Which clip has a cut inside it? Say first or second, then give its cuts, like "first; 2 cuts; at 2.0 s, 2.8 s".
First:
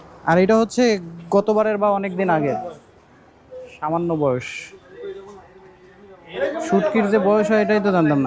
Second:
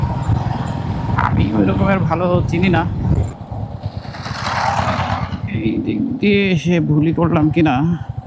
second; 1 cut; at 3.3 s